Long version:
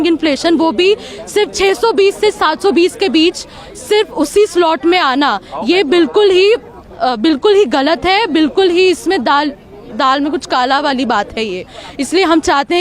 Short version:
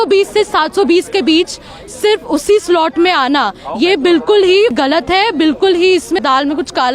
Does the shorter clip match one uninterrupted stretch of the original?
no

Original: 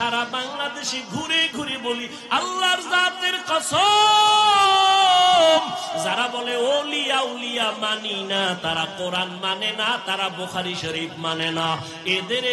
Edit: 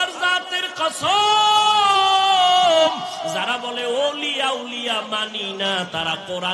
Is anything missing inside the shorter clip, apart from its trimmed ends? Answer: no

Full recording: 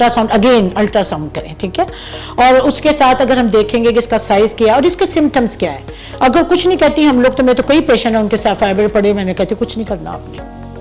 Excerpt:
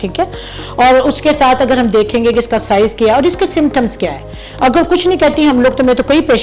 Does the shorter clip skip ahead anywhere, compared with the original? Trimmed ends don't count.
no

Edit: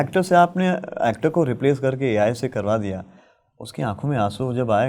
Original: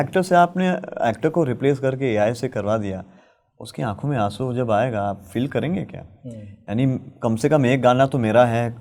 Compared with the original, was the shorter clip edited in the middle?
no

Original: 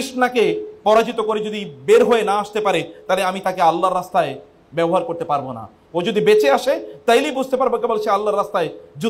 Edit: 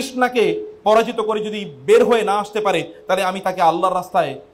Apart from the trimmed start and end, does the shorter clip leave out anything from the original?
no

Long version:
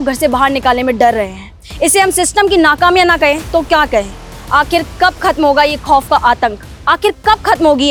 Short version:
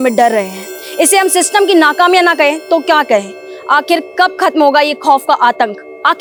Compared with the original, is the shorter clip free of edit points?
yes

